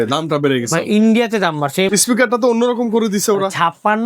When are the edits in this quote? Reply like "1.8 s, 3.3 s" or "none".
1.9 s